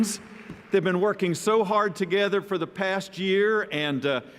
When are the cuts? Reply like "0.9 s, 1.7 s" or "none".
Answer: none